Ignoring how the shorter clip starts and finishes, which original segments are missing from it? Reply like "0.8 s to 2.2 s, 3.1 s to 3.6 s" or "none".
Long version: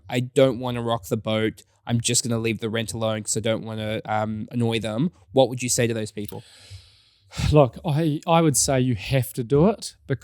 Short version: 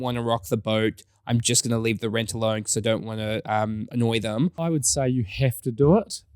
5.3 s to 8.4 s